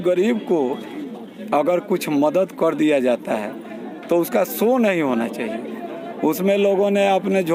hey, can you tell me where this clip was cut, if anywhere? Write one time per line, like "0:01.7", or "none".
none

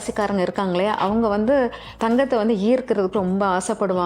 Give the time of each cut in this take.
0:01.9

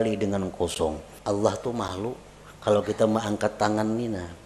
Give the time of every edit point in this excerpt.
0:01.1

